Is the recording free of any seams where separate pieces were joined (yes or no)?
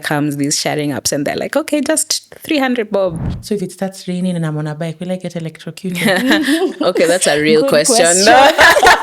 no